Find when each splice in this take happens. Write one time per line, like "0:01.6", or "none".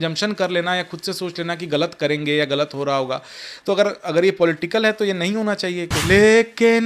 0:06.0